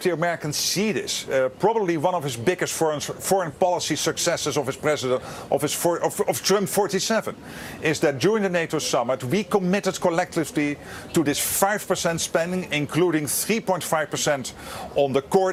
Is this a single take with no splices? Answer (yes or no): yes